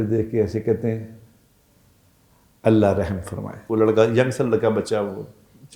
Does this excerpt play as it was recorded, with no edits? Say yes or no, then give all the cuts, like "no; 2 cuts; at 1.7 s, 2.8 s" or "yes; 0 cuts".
no; 1 cut; at 3.6 s